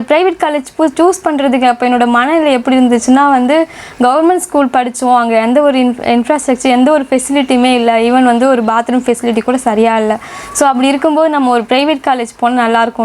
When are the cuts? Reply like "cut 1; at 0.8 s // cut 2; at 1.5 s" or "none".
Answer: none